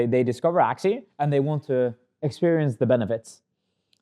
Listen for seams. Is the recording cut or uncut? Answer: cut